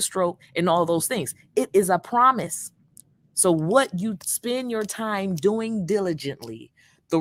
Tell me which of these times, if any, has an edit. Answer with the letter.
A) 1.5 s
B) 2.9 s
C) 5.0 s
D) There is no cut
D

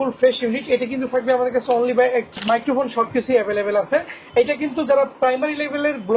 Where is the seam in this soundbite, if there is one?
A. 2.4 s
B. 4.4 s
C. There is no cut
A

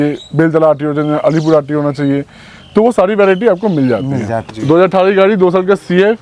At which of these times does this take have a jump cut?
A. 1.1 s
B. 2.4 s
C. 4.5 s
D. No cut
C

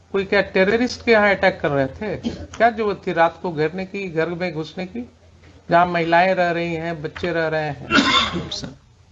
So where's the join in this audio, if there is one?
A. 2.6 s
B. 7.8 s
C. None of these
C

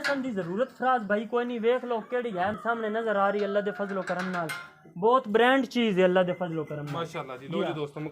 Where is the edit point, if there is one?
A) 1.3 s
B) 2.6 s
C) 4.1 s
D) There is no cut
B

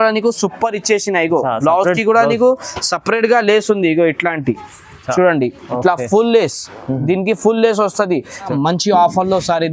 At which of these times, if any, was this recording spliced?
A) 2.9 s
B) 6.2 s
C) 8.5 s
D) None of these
C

